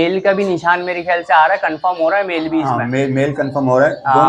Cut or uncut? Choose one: uncut